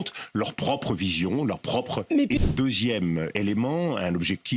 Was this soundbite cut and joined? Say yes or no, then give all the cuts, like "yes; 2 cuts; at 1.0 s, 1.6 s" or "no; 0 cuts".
yes; 1 cut; at 2.4 s